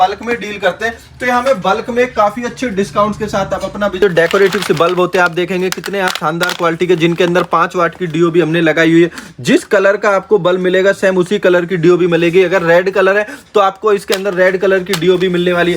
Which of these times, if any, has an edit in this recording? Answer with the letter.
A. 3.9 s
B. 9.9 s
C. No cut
A